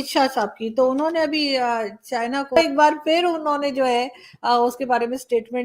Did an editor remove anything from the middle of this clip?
yes; 1 cut; at 2.6 s

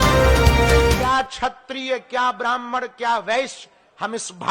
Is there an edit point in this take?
yes; 1 cut; at 1.0 s

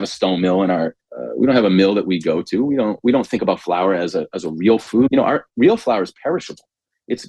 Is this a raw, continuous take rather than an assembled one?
no; 2 cuts; at 1.0 s, 5.1 s

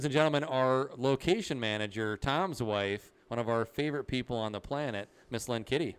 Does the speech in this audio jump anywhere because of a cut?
no; 0 cuts

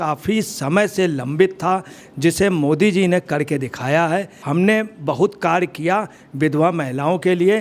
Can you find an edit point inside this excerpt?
no; 0 cuts

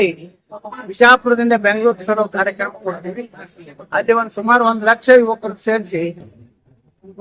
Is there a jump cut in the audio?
no; 0 cuts

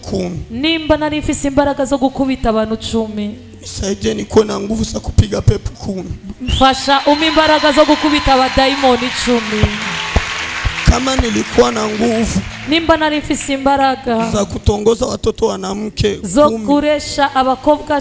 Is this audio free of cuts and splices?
yes; 0 cuts

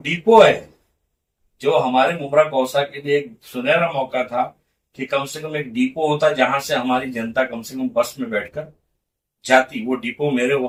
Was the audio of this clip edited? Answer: no; 0 cuts

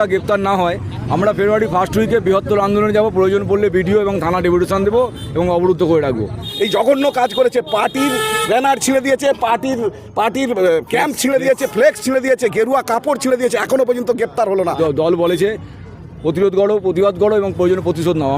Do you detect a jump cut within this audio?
yes; 2 cuts; at 6.4 s, 14.8 s

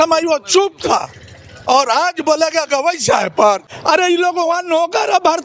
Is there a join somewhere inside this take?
yes; 1 cut; at 3.6 s

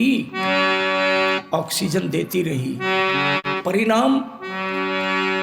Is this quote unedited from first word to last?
no; 1 cut; at 3.4 s

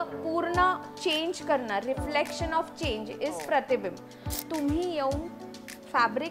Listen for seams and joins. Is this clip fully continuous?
no; 1 cut; at 4.4 s

